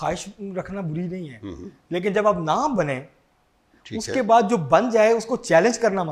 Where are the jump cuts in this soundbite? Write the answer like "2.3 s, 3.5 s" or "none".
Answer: none